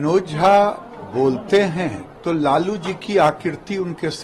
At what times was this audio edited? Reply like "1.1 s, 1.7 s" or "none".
none